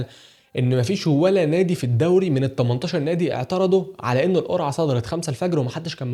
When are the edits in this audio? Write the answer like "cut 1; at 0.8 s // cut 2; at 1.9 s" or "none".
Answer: none

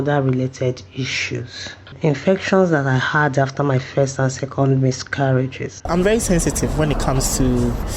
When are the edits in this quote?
cut 1; at 1.9 s // cut 2; at 5.9 s

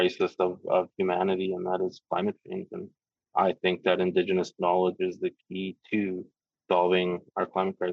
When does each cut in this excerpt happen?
none

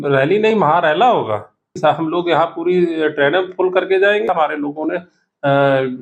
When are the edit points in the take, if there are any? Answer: cut 1; at 1.8 s // cut 2; at 4.3 s

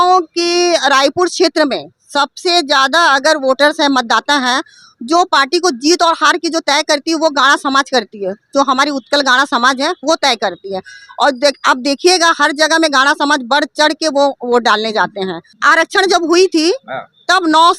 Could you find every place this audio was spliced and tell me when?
cut 1; at 15.5 s

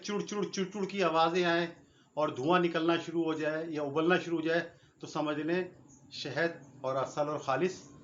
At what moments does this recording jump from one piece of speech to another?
none

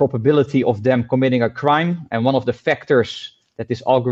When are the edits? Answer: none

